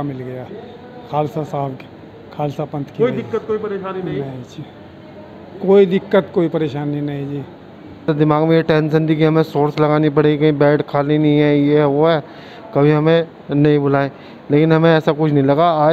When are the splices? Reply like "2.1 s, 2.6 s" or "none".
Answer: 8.1 s